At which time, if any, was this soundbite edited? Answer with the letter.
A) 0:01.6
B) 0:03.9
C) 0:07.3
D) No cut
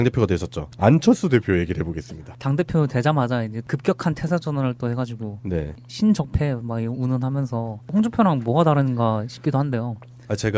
D